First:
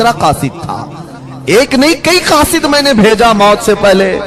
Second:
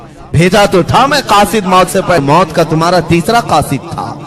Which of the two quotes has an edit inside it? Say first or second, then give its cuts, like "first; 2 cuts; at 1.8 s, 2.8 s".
second; 1 cut; at 2.2 s